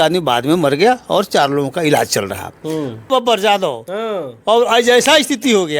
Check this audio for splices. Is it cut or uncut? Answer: cut